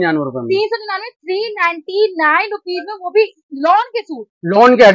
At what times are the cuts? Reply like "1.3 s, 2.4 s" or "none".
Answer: none

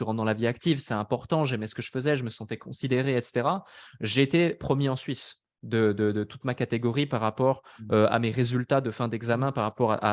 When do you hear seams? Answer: none

